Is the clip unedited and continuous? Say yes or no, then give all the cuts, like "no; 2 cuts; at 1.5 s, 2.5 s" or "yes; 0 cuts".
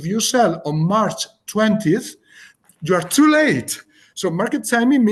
yes; 0 cuts